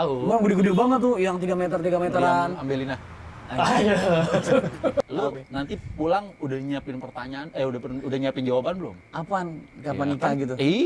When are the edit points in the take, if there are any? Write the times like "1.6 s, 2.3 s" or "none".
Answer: 5.1 s